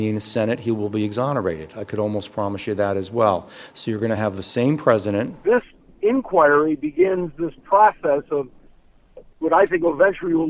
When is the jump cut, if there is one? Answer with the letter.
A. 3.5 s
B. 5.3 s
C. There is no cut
B